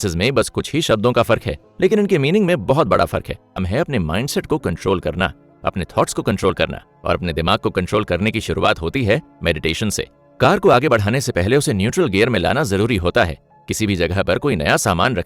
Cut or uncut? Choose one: cut